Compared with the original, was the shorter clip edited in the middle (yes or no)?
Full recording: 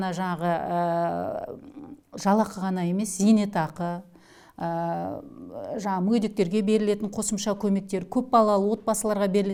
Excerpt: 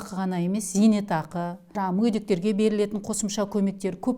yes